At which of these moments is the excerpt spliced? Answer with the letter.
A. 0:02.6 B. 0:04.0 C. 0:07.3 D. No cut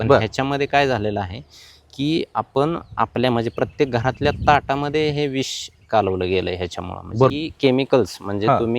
C